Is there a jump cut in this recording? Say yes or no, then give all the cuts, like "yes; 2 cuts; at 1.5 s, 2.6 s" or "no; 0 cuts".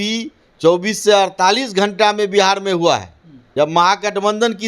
yes; 1 cut; at 3.5 s